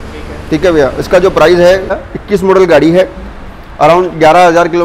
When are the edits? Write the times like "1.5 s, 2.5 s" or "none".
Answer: 1.9 s